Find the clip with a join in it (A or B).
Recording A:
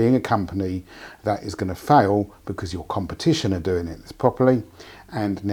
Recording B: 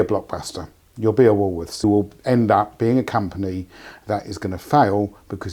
B